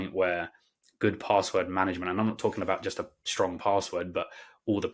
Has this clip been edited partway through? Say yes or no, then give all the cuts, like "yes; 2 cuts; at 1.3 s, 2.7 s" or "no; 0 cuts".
no; 0 cuts